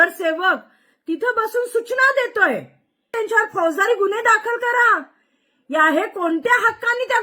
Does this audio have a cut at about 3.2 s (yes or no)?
yes